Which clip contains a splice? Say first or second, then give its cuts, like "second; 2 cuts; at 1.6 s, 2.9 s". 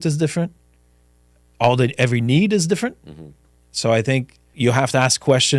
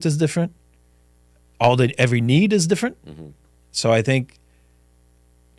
first; 1 cut; at 4.4 s